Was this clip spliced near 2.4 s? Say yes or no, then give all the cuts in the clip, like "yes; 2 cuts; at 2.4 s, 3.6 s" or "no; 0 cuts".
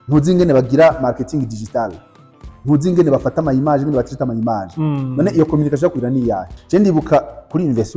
no; 1 cut; at 6.5 s